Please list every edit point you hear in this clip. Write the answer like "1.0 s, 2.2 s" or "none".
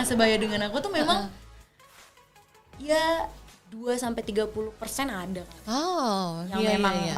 none